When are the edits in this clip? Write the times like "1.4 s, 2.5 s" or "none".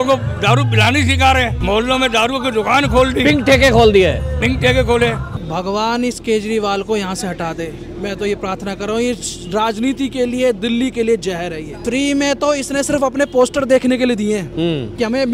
1.6 s, 5.4 s, 11.9 s, 14.5 s